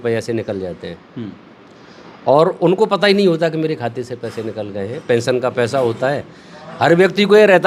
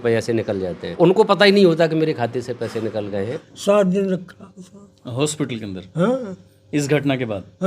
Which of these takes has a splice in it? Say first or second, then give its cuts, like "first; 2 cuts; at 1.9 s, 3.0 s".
second; 2 cuts; at 0.9 s, 3.4 s